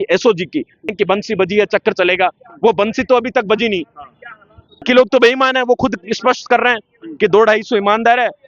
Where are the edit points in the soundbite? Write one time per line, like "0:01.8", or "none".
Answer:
0:00.9
0:04.8